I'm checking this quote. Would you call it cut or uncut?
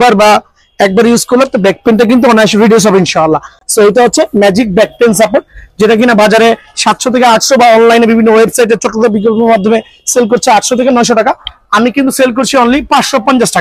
uncut